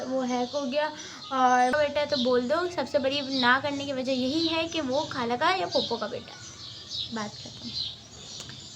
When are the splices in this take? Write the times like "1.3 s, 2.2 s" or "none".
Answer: 1.7 s